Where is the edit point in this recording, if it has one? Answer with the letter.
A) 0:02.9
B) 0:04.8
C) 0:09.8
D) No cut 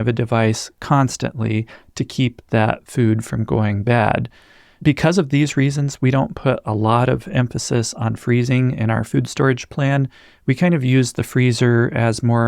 B